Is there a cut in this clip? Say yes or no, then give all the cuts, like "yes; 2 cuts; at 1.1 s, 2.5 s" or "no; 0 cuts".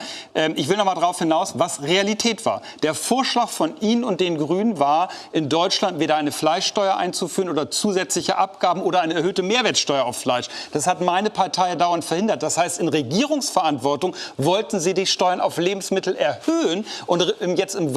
no; 0 cuts